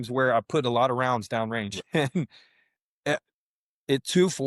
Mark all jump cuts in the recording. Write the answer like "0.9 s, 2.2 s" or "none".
none